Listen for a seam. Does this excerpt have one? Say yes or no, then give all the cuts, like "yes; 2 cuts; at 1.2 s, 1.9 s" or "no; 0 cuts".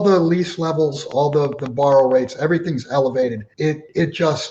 yes; 1 cut; at 3.5 s